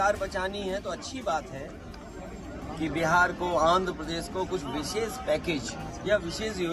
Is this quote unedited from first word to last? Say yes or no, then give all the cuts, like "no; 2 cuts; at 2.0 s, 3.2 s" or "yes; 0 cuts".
yes; 0 cuts